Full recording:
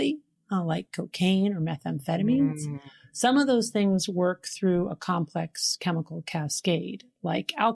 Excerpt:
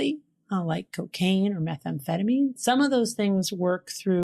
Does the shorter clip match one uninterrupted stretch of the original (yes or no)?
no